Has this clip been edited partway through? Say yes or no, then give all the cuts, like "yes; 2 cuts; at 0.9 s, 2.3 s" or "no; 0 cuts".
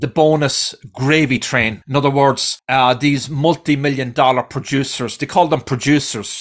yes; 2 cuts; at 1.8 s, 2.5 s